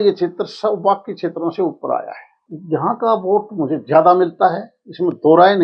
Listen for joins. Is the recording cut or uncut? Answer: cut